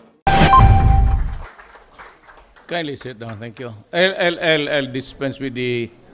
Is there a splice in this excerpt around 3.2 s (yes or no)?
yes